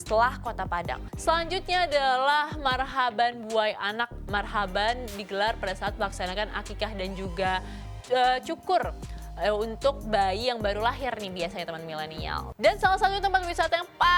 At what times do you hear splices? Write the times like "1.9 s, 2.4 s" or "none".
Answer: 1.0 s, 12.4 s